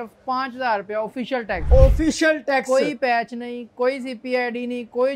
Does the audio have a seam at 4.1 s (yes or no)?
no